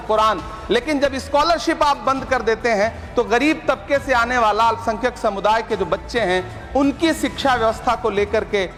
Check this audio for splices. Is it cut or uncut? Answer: uncut